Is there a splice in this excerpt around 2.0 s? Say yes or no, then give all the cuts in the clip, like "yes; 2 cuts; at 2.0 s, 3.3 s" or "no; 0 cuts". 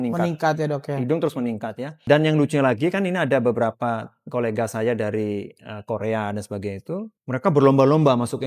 yes; 2 cuts; at 2.0 s, 7.2 s